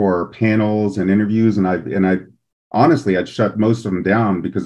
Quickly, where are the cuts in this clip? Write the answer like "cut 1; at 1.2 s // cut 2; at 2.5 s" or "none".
none

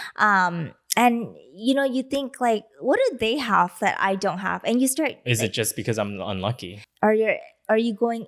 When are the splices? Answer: cut 1; at 6.8 s

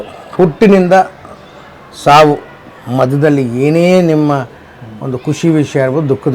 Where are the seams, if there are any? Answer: none

